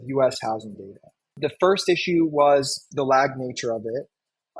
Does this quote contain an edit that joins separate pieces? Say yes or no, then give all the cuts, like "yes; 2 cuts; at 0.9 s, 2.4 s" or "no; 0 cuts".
yes; 1 cut; at 1.3 s